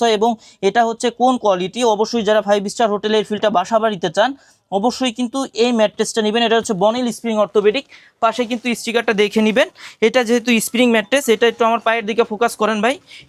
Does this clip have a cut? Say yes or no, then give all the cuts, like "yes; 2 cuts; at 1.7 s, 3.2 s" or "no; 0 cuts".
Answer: no; 0 cuts